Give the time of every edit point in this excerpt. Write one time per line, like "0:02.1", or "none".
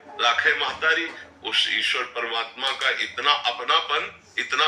0:01.3